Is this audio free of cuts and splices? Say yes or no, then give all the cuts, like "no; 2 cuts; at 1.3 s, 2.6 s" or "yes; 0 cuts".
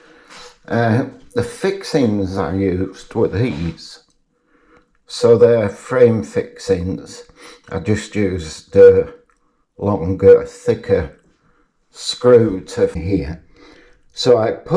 no; 1 cut; at 13.0 s